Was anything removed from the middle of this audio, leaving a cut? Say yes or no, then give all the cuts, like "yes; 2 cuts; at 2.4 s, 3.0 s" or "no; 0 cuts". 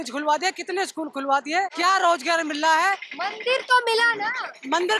yes; 1 cut; at 1.7 s